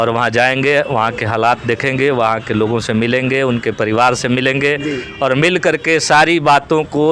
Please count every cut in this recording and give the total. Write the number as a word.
zero